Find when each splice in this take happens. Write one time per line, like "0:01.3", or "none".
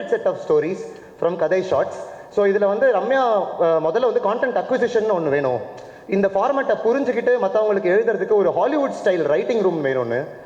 none